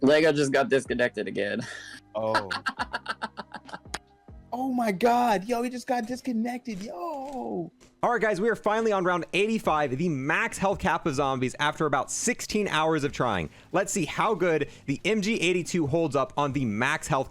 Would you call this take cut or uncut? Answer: cut